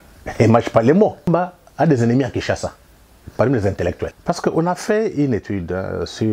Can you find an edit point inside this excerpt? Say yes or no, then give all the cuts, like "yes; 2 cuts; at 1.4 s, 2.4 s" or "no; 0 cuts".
yes; 2 cuts; at 1.3 s, 4.2 s